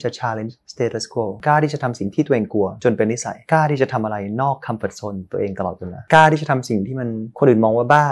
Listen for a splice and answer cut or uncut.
cut